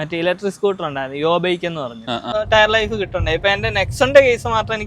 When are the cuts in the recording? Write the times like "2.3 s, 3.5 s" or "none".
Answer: 2.3 s